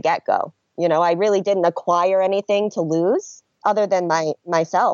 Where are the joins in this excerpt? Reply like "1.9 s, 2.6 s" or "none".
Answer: 3.4 s